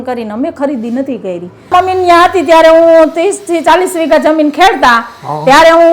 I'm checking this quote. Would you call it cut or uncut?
cut